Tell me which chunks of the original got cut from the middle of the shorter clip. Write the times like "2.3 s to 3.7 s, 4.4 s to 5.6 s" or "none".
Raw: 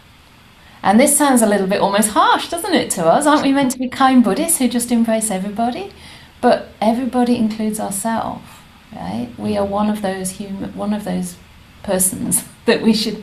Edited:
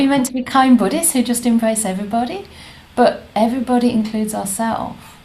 none